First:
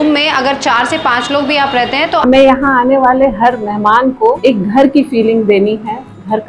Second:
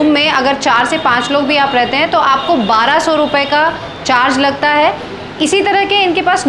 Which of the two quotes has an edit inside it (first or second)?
first